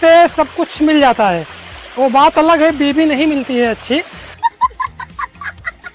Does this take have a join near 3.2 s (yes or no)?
no